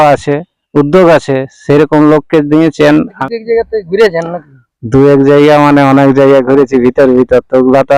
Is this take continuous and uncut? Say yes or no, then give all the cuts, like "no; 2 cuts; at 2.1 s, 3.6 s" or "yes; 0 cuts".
no; 1 cut; at 3.2 s